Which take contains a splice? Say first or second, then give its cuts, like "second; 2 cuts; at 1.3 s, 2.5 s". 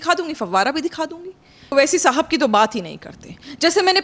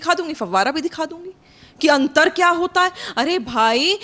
first; 1 cut; at 1.7 s